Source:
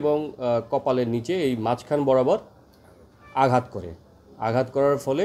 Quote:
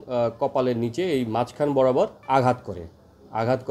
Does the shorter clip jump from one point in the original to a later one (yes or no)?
yes